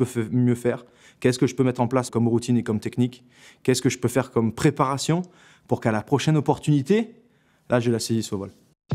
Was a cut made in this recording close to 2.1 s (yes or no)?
yes